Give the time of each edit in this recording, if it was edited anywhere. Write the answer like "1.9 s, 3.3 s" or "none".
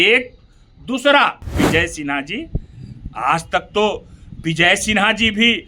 1.5 s